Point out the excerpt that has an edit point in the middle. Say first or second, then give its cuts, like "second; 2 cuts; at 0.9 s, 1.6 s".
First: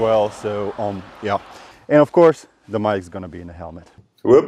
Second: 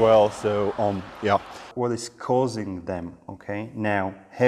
second; 1 cut; at 1.7 s